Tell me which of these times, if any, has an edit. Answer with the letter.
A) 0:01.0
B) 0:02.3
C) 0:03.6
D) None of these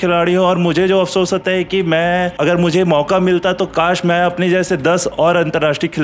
B